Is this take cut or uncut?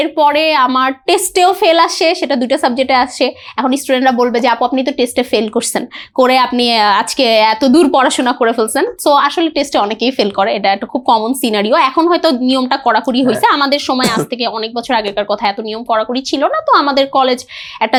uncut